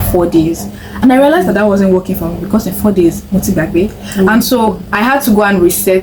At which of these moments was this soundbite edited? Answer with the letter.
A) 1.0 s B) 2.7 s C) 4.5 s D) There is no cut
D